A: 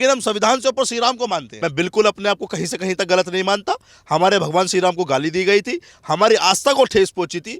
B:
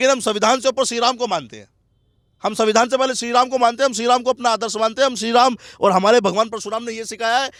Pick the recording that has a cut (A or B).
A